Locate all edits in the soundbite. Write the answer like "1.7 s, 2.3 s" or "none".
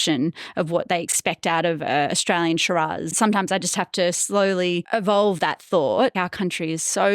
1.2 s, 3.1 s, 4.8 s, 6.1 s